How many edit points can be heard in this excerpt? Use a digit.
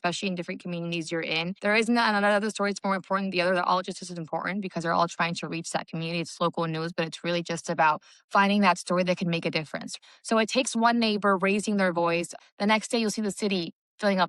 3